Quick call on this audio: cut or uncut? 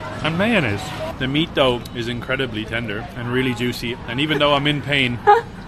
cut